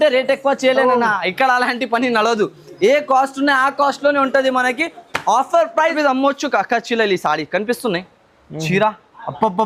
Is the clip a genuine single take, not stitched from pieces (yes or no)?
no